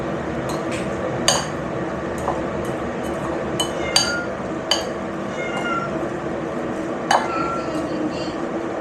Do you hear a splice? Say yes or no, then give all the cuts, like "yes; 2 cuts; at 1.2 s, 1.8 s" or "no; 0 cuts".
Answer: no; 0 cuts